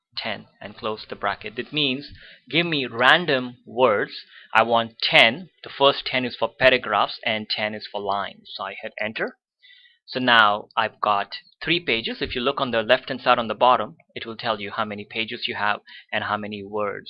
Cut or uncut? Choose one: cut